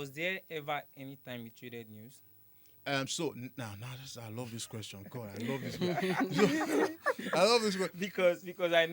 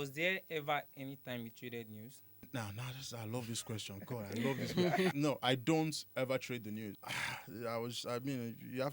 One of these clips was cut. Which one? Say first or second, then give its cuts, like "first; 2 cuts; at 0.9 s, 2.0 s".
second; 3 cuts; at 2.5 s, 5.1 s, 6.9 s